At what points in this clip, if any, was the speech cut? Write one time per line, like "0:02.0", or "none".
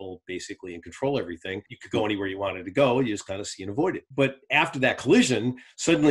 0:01.6
0:04.0